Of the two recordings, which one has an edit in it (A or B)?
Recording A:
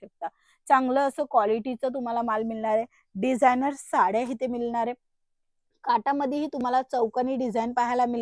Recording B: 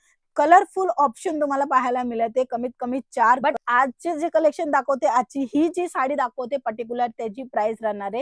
B